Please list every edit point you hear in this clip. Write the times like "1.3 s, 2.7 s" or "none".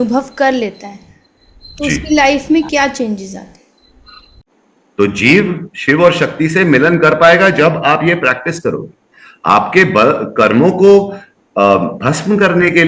4.6 s